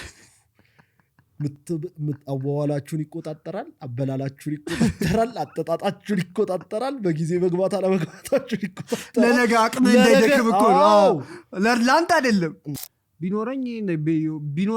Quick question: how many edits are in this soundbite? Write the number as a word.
one